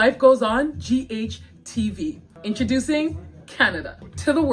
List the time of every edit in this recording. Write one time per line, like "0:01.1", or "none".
0:02.3